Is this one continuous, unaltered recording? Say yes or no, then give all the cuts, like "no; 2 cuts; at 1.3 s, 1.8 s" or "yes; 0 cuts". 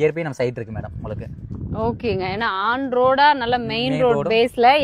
yes; 0 cuts